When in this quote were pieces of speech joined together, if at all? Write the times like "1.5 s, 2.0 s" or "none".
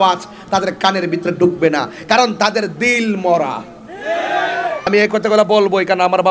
4.9 s